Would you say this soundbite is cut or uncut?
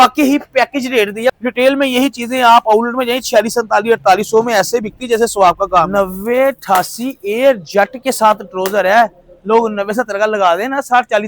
cut